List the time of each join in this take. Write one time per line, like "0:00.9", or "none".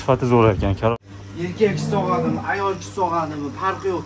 0:01.0

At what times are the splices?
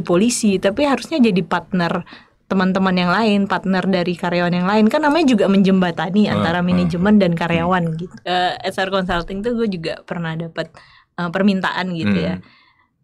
0:08.2

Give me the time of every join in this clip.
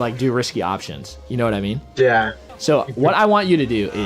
0:02.4

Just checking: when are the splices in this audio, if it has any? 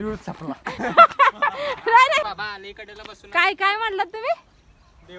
0:02.3

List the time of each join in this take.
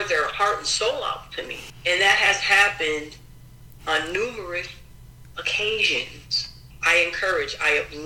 0:01.6
0:06.7

